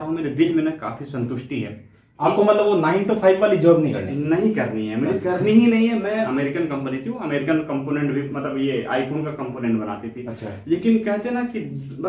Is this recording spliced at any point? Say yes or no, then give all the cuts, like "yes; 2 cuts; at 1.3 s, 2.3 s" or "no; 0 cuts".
yes; 1 cut; at 6.3 s